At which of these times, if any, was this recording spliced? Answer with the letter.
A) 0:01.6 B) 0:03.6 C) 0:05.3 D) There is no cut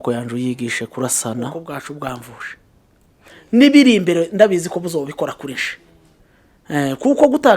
A